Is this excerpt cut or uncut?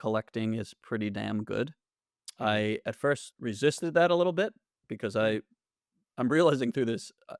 uncut